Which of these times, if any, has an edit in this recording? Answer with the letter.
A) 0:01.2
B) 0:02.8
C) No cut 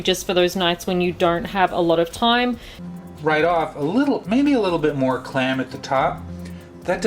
B